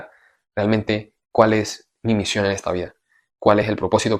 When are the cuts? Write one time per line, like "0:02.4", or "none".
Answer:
none